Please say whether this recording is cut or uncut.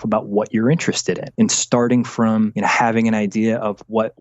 cut